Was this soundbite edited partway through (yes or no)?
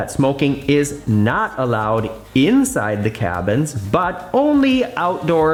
no